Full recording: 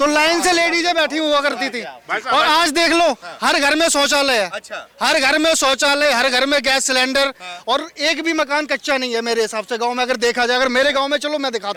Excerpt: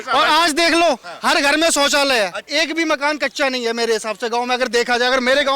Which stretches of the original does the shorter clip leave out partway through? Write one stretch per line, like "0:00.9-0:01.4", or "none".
0:04.6-0:07.9